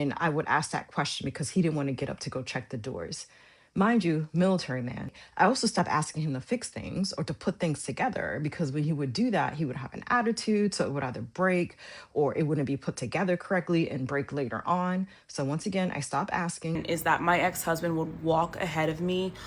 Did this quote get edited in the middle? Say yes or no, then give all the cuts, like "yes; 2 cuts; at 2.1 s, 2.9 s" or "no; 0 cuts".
yes; 2 cuts; at 5.2 s, 16.8 s